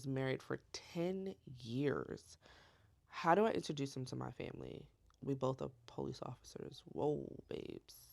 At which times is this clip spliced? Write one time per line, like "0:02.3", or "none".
none